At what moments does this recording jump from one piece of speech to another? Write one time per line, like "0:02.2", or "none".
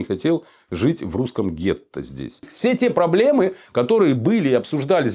0:02.5